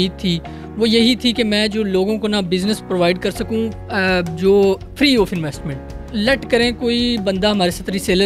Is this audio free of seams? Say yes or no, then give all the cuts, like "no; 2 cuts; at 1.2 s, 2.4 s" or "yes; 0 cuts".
no; 1 cut; at 6.0 s